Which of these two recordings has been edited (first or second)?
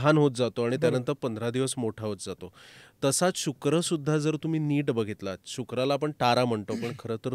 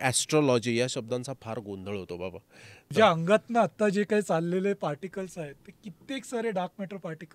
second